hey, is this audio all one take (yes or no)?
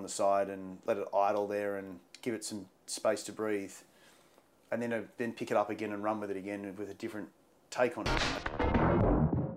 no